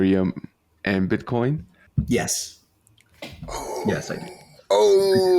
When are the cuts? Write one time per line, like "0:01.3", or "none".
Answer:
0:01.8